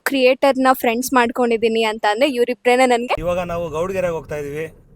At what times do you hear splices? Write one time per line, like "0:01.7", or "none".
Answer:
0:03.2